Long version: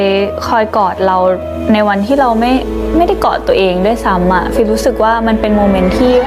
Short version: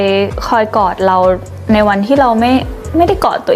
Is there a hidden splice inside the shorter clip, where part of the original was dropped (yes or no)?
no